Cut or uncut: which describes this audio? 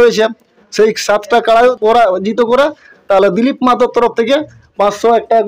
cut